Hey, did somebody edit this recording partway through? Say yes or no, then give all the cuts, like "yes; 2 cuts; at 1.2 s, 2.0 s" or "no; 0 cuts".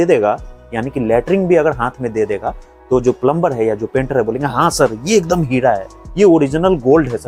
no; 0 cuts